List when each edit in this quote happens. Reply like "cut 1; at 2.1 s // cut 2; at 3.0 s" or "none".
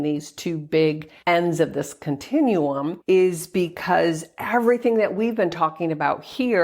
cut 1; at 1.1 s // cut 2; at 2.9 s